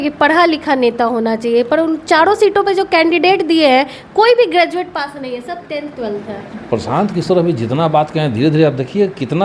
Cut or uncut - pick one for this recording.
uncut